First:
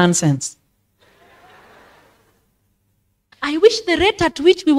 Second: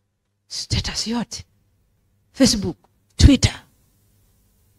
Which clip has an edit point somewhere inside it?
first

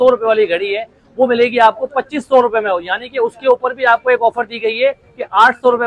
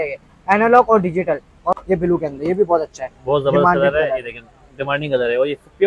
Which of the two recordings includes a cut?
second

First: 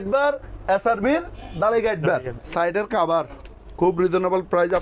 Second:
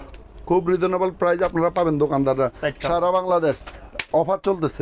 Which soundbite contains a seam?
first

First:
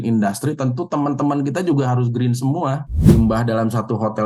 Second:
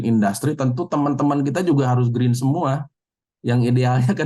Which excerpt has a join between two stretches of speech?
first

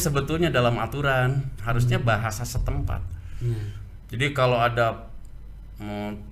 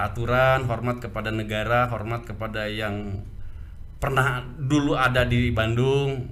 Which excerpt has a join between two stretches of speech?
first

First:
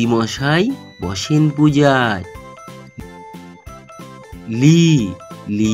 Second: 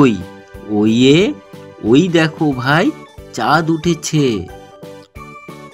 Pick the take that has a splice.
second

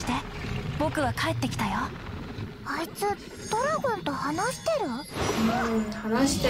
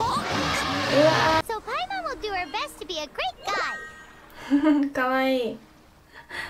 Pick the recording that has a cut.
second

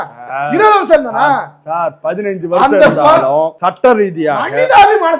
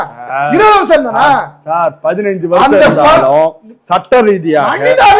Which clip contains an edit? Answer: first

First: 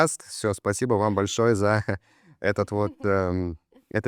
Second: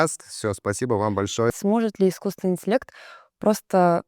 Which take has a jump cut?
second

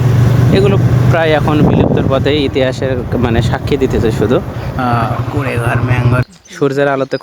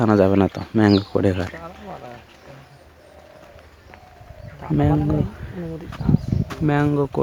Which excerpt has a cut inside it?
first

